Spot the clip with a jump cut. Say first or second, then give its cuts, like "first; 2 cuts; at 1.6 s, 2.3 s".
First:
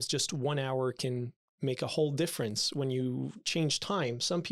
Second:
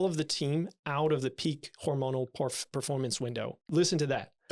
second; 1 cut; at 3.6 s